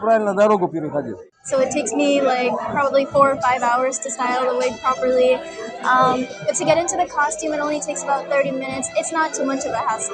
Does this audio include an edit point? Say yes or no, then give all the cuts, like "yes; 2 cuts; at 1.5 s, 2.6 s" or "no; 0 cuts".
yes; 1 cut; at 1.3 s